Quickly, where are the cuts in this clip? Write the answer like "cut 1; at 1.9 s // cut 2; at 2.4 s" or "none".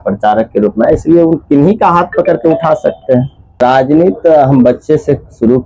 cut 1; at 3.6 s